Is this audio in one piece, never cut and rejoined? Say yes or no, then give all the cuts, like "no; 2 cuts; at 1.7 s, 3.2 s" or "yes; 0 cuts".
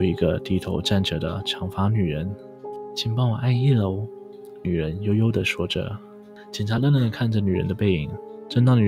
yes; 0 cuts